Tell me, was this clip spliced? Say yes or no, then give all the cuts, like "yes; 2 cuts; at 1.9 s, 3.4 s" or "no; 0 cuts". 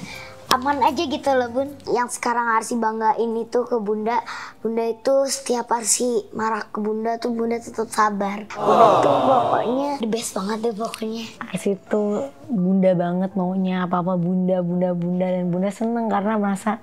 yes; 3 cuts; at 1.8 s, 9.2 s, 11.3 s